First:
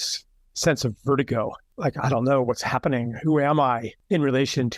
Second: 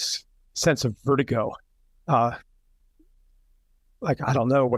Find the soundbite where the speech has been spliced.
first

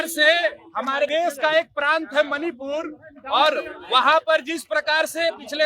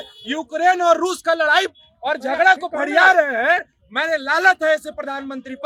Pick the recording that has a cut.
first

